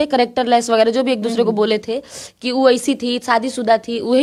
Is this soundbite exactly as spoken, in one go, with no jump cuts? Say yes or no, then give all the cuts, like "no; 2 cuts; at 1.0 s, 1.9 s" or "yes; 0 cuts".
yes; 0 cuts